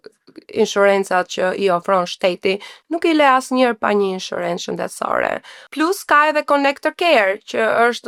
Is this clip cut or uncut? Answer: uncut